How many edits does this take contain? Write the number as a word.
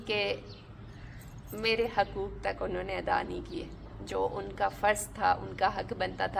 zero